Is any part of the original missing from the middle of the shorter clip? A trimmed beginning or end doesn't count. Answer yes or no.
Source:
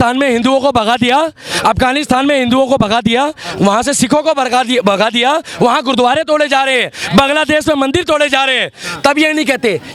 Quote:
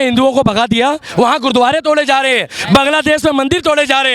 yes